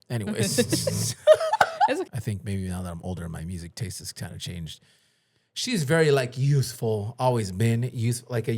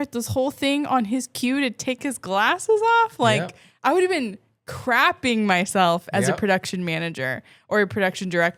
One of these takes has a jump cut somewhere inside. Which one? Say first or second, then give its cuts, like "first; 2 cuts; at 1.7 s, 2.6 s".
first; 1 cut; at 2.1 s